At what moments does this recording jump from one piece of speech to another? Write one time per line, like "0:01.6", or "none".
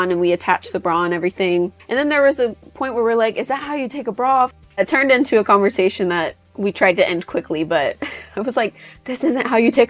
0:01.8
0:04.8